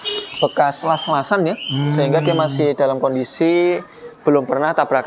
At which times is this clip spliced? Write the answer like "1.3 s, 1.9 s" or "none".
none